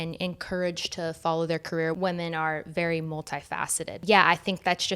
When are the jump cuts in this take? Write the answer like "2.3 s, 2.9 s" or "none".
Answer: 2.0 s, 4.0 s